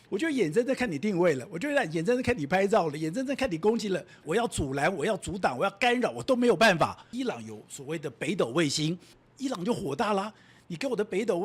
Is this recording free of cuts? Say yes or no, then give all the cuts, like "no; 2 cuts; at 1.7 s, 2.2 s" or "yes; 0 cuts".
no; 3 cuts; at 4.2 s, 7.1 s, 9.2 s